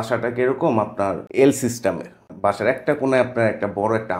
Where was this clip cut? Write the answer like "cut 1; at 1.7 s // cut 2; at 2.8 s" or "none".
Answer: cut 1; at 1.2 s // cut 2; at 2.3 s